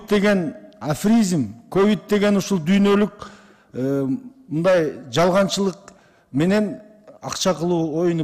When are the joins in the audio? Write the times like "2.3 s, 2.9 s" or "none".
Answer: none